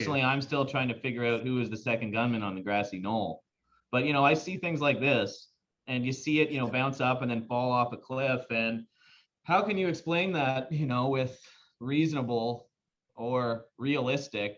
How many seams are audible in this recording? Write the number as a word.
zero